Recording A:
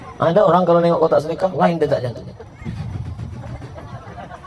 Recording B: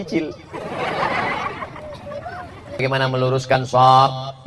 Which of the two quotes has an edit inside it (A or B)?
B